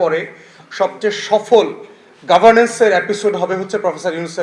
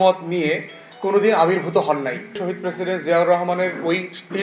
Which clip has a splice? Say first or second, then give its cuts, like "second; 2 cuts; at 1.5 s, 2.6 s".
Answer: second; 1 cut; at 2.4 s